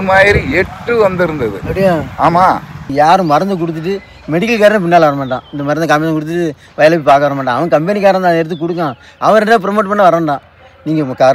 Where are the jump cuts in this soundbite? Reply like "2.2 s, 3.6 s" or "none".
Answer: 2.8 s

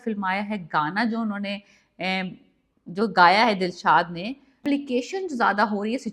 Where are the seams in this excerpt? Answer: 4.6 s

